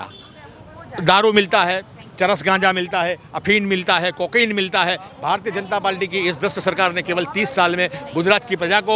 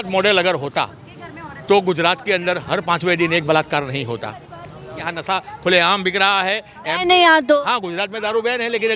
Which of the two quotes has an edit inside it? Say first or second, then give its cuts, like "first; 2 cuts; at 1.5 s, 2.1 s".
second; 1 cut; at 5.1 s